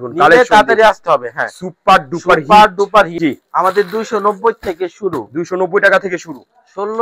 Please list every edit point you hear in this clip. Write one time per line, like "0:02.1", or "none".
0:03.1